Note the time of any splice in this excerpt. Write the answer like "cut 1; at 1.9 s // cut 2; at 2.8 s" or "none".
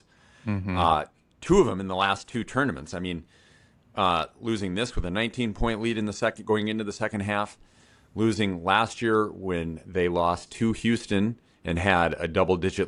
none

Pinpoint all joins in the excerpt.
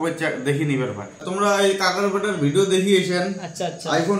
cut 1; at 1.2 s

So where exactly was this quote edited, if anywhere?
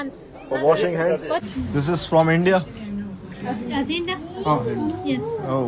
cut 1; at 1.5 s

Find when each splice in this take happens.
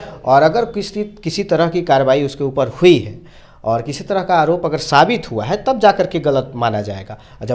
none

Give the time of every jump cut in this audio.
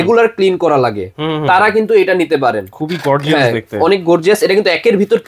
none

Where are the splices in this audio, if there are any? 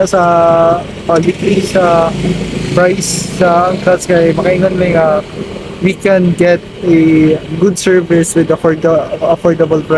none

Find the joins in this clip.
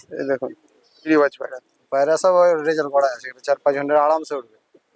cut 1; at 1.0 s

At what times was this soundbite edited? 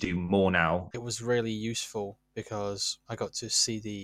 cut 1; at 0.9 s // cut 2; at 2.9 s

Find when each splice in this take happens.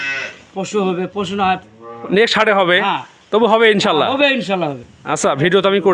cut 1; at 4.9 s

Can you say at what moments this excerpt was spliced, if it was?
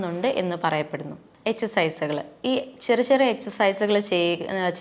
cut 1; at 1.2 s

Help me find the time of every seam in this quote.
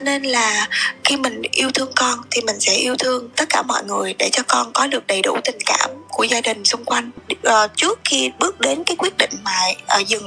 cut 1; at 7.2 s

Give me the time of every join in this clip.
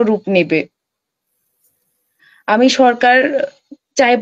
none

